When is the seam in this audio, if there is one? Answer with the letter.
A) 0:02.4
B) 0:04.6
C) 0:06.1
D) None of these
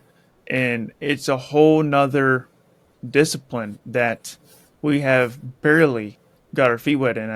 D